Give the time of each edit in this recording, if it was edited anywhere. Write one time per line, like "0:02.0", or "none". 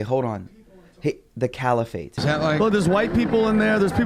0:02.2